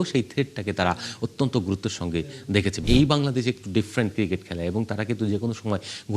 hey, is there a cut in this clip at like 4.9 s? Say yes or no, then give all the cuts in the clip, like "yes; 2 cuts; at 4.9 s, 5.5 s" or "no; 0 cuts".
no; 1 cut; at 2.8 s